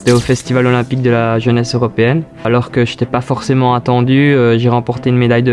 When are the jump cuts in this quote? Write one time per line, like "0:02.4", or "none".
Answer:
none